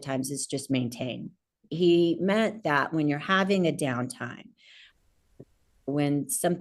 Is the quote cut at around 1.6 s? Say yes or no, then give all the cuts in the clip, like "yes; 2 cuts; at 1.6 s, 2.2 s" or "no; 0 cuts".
yes; 1 cut; at 1.6 s